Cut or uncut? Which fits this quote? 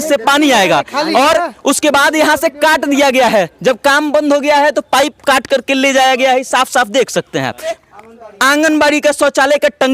cut